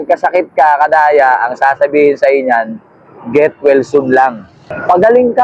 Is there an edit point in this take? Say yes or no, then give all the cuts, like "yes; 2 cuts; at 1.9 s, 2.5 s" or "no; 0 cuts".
yes; 1 cut; at 4.4 s